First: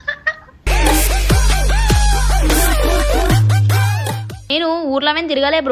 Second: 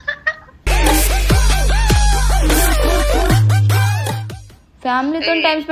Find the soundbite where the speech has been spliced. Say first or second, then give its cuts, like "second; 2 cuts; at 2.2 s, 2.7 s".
first; 1 cut; at 4.4 s